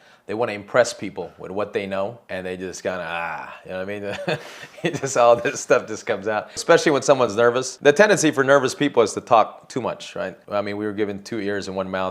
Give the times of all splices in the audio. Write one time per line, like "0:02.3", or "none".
0:02.2
0:06.6
0:07.7
0:10.4